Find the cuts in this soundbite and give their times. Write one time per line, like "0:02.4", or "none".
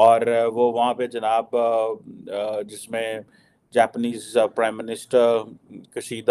none